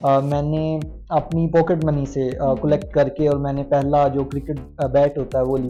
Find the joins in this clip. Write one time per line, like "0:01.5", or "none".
none